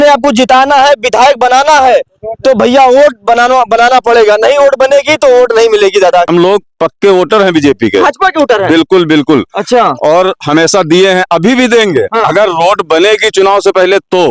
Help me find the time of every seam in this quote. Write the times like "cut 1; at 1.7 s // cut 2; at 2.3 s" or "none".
cut 1; at 6.3 s